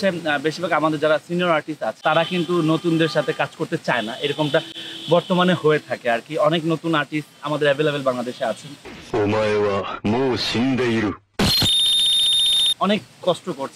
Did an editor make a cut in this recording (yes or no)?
no